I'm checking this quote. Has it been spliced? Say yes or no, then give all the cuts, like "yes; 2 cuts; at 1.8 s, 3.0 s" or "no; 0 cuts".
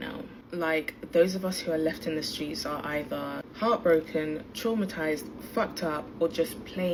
no; 0 cuts